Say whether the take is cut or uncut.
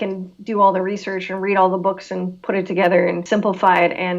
cut